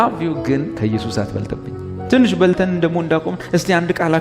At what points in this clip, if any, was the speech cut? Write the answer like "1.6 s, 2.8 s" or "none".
1.9 s